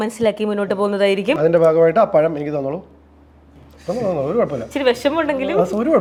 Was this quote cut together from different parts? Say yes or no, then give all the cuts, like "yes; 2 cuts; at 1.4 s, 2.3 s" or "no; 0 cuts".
no; 0 cuts